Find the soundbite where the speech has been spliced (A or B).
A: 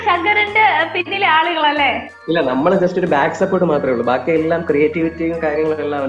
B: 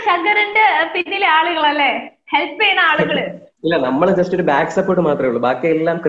A